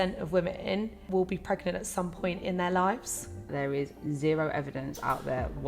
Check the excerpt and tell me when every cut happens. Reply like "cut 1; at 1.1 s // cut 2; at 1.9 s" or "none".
cut 1; at 1.0 s // cut 2; at 3.5 s